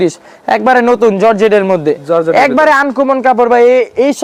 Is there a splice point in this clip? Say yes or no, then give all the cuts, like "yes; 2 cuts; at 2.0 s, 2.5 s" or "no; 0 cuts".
no; 0 cuts